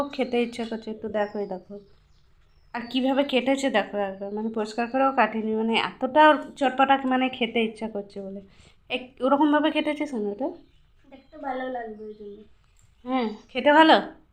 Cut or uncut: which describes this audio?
uncut